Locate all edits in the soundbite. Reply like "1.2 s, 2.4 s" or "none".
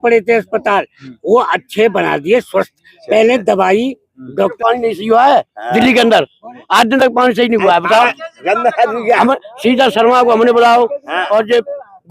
4.5 s

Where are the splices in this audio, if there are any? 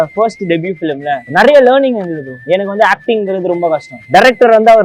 1.2 s, 2.3 s, 3.9 s

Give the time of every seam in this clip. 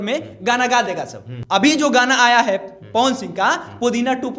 1.4 s

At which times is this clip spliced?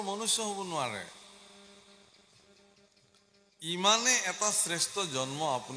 none

